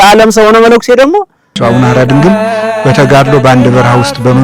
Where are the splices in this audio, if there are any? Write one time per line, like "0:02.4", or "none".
0:01.5